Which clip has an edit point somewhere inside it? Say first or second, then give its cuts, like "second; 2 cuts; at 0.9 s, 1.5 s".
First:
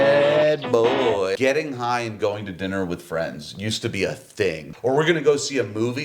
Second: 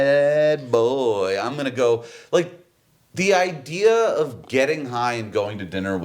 first; 2 cuts; at 1.4 s, 4.6 s